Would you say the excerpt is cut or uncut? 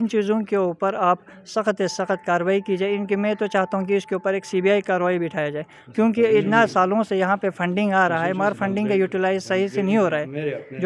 uncut